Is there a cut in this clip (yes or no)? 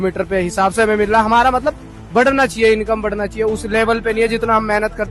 no